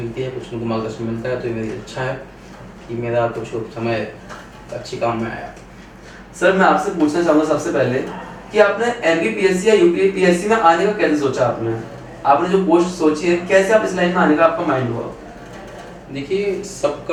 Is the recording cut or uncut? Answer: uncut